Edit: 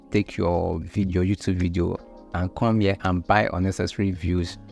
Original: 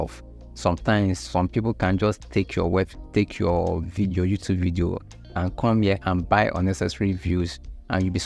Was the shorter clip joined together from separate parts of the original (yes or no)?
no